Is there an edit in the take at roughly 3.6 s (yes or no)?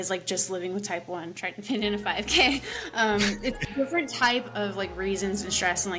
yes